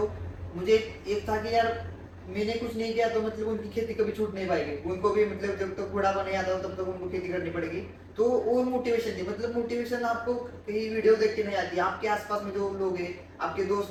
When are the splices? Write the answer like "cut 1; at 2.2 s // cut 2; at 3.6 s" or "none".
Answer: none